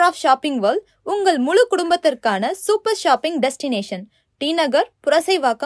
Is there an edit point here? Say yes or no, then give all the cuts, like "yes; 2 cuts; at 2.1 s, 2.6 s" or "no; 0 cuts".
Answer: no; 0 cuts